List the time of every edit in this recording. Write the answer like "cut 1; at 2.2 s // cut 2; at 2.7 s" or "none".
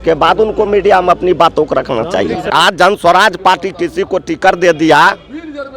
cut 1; at 2.4 s